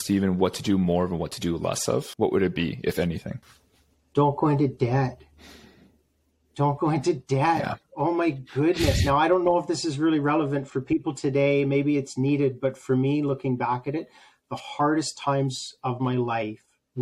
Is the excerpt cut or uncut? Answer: uncut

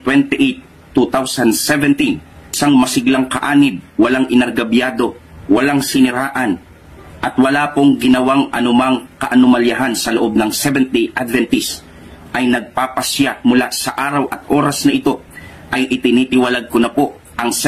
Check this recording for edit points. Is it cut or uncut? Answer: uncut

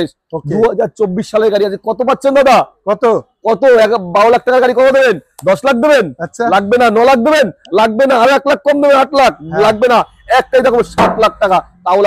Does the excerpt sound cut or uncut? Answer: uncut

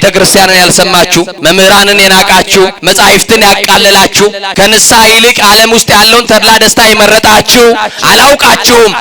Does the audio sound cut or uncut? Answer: cut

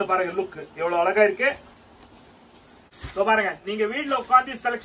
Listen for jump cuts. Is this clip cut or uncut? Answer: cut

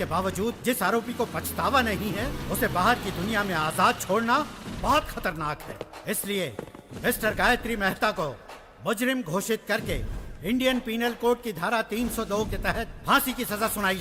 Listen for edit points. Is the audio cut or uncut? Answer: uncut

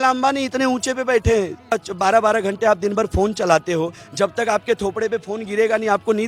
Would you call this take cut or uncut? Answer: cut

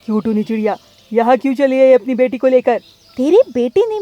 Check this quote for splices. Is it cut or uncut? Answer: cut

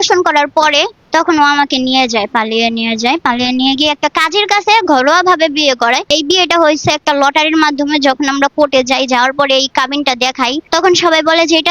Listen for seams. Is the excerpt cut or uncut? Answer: cut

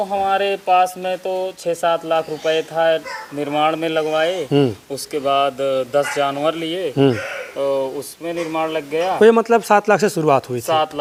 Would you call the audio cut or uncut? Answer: uncut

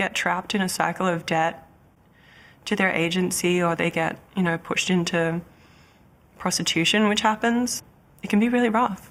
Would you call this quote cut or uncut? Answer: uncut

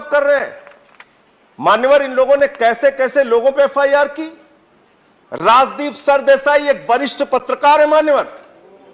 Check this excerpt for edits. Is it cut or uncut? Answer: uncut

